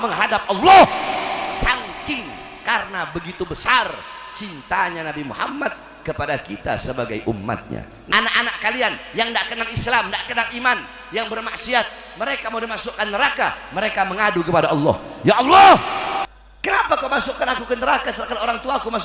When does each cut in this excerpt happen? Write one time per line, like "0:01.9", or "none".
0:08.0
0:16.3